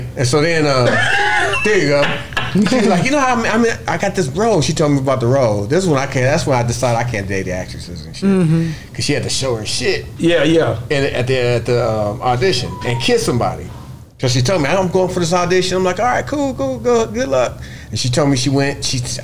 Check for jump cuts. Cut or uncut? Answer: uncut